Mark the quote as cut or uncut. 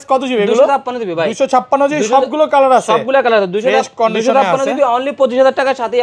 uncut